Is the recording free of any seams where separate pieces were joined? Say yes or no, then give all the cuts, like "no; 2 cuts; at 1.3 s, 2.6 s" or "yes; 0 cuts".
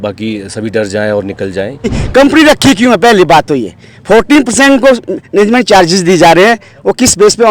no; 1 cut; at 2.0 s